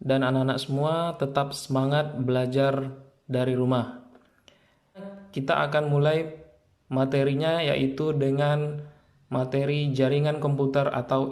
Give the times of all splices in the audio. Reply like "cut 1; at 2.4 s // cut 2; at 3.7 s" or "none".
cut 1; at 5.1 s